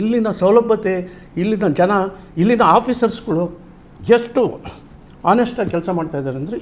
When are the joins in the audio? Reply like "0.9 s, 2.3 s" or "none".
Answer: none